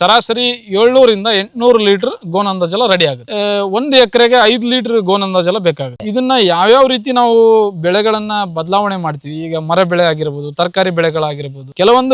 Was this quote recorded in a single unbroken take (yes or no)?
no